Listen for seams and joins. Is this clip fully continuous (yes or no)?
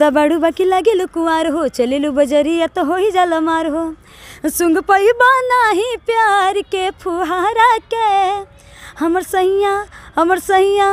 yes